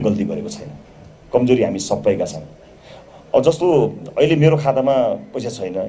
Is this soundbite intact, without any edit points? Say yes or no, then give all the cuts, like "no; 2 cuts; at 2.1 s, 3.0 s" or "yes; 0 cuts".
yes; 0 cuts